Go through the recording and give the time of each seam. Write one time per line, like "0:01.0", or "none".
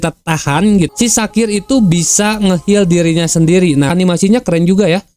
0:00.9
0:03.9